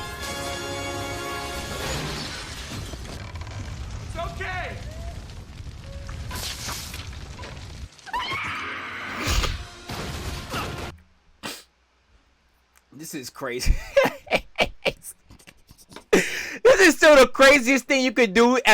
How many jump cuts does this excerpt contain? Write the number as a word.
one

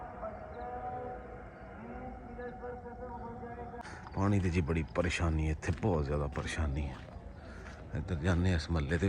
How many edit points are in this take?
one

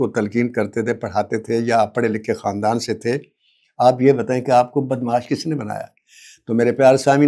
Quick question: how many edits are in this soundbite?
zero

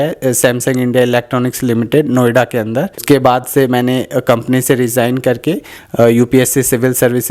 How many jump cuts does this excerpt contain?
one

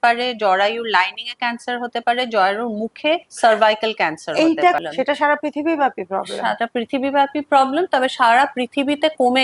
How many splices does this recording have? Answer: one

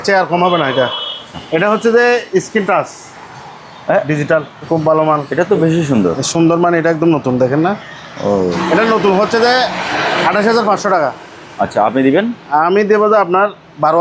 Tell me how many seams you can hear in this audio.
three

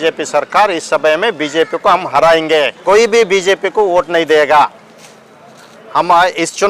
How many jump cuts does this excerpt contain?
one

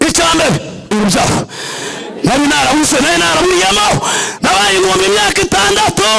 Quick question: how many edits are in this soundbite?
one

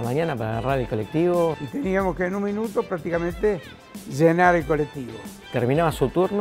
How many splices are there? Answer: two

